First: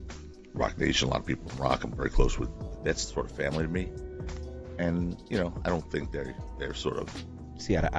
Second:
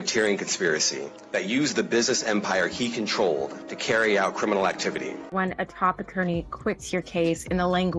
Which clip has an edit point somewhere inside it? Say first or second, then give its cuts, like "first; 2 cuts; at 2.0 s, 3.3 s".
second; 1 cut; at 5.5 s